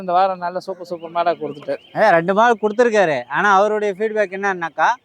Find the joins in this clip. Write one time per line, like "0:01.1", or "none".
none